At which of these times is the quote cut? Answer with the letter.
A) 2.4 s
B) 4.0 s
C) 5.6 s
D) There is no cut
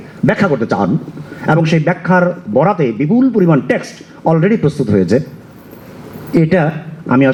D